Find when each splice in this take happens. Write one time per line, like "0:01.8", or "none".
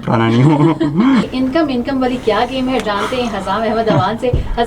0:01.3